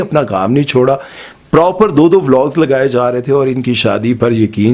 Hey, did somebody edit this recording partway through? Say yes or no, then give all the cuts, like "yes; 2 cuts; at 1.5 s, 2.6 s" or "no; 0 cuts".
no; 0 cuts